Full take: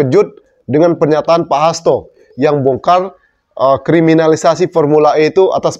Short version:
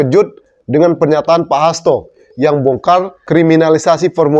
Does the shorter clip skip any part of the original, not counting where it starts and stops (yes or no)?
yes